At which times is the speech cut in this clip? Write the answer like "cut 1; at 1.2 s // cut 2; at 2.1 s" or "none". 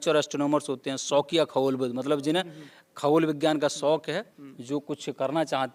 none